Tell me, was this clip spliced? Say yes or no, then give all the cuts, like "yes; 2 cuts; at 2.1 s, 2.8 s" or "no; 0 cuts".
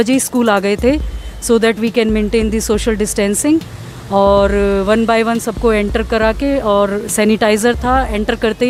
no; 0 cuts